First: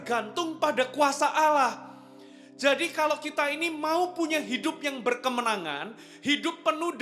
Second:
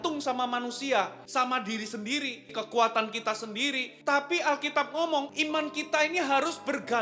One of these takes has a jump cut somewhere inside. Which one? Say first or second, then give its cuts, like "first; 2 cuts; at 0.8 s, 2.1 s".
second; 4 cuts; at 1.2 s, 2.5 s, 3.9 s, 5.3 s